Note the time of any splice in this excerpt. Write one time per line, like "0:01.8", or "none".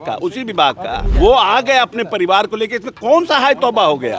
0:01.1